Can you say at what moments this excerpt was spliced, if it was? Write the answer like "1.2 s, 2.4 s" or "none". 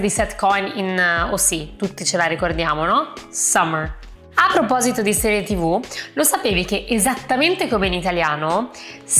none

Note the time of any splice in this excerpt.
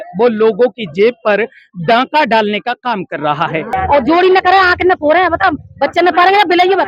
3.7 s

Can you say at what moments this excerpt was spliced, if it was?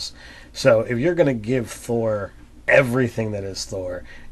2.6 s

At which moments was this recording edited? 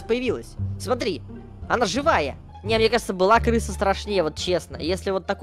2.5 s

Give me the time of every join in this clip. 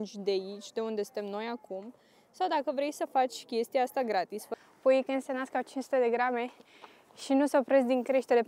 4.4 s

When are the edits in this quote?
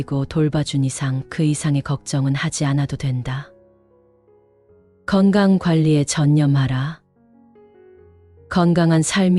7.1 s, 8.4 s

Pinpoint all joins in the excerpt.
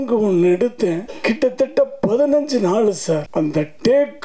1.1 s, 3.3 s

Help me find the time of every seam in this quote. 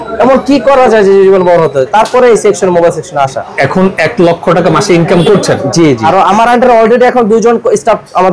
3.4 s, 6.1 s

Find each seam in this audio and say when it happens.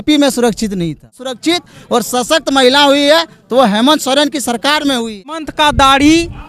1.3 s, 5.5 s

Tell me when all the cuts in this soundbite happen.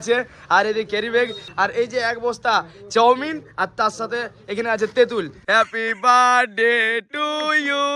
1.4 s, 5.4 s

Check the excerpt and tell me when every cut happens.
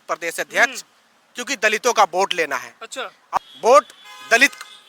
3.4 s

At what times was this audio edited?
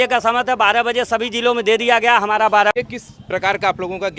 2.7 s

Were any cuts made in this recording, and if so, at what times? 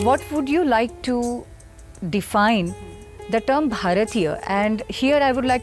none

